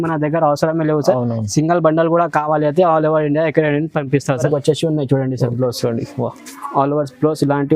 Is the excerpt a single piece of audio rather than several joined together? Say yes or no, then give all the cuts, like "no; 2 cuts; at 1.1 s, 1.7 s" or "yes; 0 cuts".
no; 1 cut; at 4.4 s